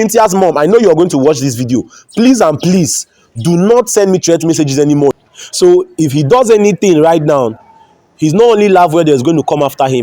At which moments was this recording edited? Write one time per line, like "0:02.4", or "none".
0:05.1